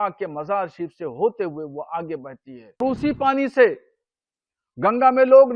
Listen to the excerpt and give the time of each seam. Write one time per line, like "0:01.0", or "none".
0:02.8